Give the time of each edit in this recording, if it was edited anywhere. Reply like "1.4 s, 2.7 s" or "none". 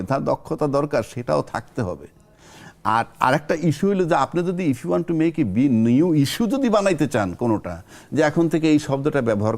none